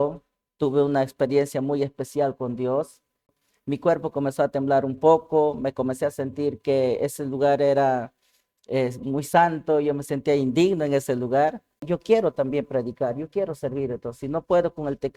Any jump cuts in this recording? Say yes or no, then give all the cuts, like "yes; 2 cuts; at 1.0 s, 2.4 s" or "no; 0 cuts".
yes; 2 cuts; at 3.4 s, 11.8 s